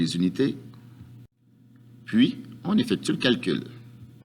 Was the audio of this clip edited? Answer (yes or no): yes